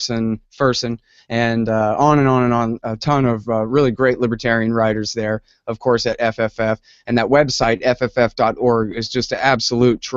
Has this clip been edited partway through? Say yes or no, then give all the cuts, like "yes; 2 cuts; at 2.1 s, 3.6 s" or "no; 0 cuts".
yes; 1 cut; at 1.2 s